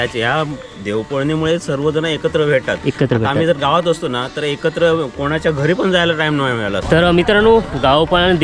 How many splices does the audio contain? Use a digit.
1